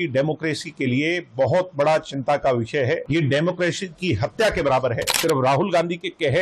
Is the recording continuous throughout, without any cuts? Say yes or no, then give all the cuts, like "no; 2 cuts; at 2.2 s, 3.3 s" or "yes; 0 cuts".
no; 2 cuts; at 3.0 s, 5.1 s